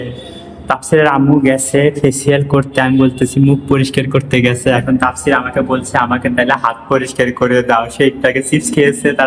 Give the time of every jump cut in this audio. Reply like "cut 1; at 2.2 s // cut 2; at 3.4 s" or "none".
none